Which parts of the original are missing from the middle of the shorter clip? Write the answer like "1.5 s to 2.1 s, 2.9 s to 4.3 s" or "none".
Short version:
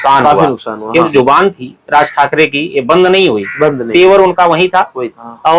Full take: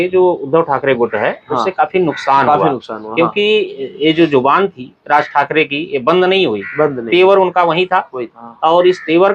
3.3 s to 4.3 s

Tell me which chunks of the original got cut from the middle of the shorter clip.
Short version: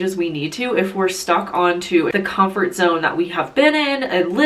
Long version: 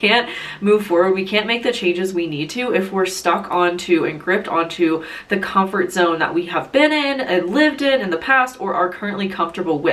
4.1 s to 5.3 s

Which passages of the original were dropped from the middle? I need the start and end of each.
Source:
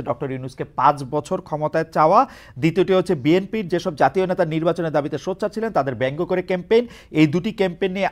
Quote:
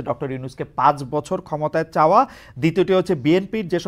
none

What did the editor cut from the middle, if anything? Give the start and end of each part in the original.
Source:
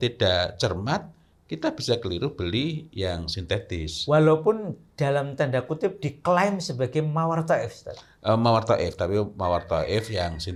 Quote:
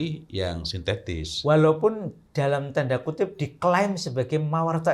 none

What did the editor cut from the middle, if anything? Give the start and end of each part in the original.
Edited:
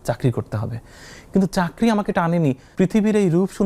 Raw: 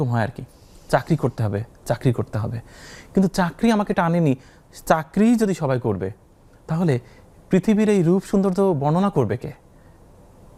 4.5 s to 7.4 s

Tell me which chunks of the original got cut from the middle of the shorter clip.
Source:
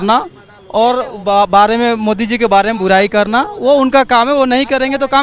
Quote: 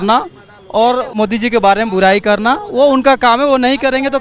1.1 s to 2.0 s

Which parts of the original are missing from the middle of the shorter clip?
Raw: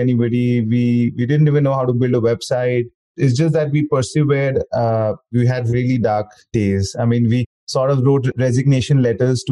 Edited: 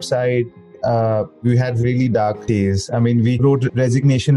3.2 s to 4.7 s, 6.3 s to 6.5 s, 7.4 s to 8.0 s

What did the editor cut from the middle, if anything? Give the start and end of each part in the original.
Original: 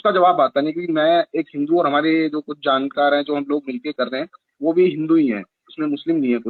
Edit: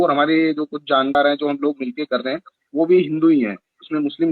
2.9 s to 3.0 s

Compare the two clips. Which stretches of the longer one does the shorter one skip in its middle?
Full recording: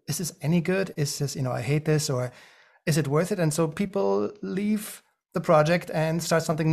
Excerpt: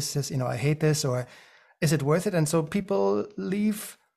none

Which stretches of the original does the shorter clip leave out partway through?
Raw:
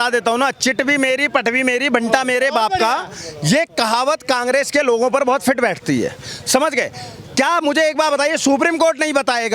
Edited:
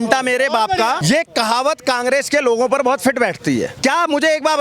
3.0 s to 3.4 s, 6.1 s to 7.3 s

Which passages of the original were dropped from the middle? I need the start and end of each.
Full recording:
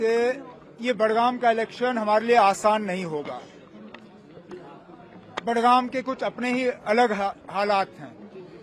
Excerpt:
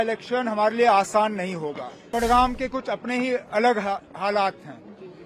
3.4 s to 5.3 s

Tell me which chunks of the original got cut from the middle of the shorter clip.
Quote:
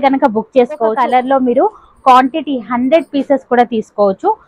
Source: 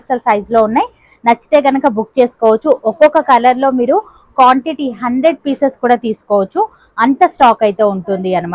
2.5 s to 3.2 s

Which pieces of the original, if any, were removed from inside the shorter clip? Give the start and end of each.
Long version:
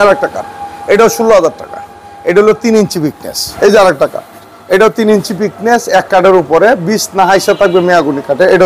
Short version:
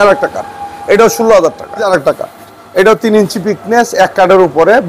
1.9 s to 3.8 s

